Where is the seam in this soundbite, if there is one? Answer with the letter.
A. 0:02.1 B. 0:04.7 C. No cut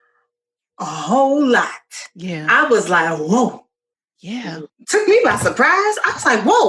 B